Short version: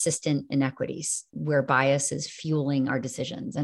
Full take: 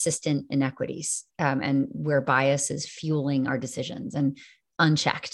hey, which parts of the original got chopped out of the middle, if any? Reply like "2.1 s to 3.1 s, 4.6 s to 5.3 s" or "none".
1.3 s to 1.9 s